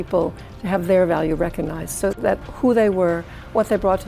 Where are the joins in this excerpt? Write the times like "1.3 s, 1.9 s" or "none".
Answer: 2.3 s